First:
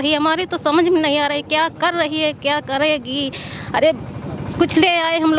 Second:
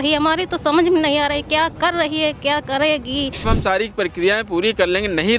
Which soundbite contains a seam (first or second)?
second